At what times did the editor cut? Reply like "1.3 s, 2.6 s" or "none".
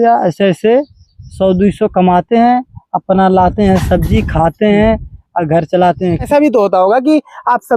6.3 s

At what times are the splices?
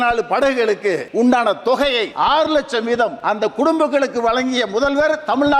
1.0 s, 2.1 s, 3.2 s

